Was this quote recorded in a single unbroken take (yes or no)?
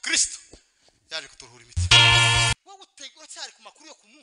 no